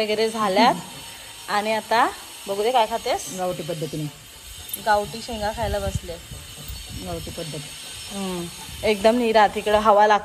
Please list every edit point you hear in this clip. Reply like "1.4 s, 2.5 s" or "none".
none